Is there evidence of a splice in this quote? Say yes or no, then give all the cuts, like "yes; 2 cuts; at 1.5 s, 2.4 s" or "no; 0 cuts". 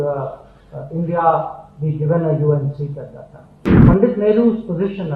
yes; 1 cut; at 3.8 s